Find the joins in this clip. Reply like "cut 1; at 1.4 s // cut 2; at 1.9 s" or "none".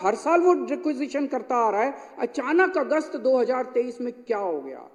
none